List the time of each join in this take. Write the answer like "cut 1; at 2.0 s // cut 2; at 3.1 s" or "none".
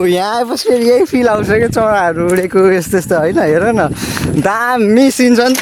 none